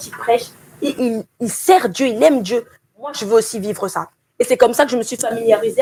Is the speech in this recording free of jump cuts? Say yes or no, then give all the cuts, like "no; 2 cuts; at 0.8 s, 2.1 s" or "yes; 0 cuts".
yes; 0 cuts